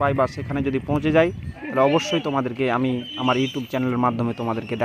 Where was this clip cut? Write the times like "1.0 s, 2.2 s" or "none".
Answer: none